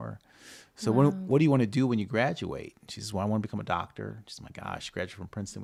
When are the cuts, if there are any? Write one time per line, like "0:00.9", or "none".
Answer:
none